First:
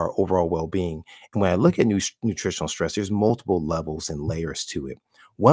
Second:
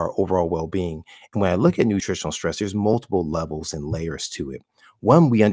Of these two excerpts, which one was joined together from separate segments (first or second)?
second